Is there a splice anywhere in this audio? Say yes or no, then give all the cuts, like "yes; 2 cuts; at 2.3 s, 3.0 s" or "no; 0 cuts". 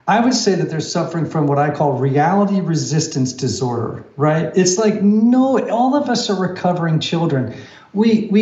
no; 0 cuts